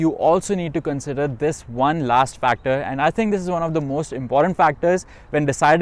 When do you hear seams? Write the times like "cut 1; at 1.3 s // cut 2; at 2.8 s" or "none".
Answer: none